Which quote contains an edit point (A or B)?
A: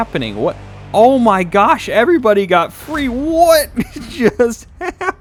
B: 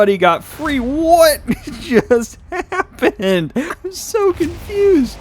B